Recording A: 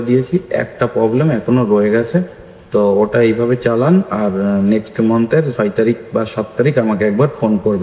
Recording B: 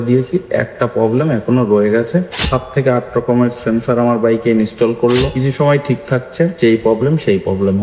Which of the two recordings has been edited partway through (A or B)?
B